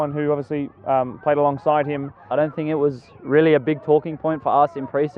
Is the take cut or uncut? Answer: cut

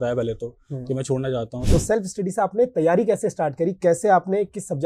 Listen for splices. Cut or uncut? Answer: cut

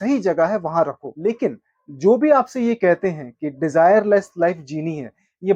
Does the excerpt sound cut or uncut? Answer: cut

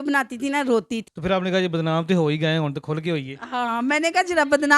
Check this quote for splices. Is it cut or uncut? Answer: cut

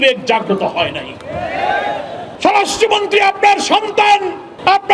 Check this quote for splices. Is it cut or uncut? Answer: cut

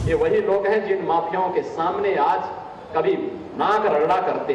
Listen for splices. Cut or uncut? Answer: uncut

